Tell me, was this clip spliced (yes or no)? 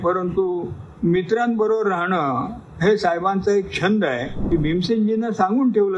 yes